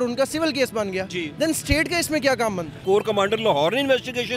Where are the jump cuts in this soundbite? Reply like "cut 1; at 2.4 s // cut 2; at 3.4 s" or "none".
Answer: cut 1; at 2.8 s